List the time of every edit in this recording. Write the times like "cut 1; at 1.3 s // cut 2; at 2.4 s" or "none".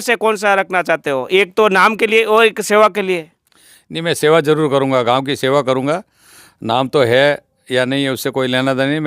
none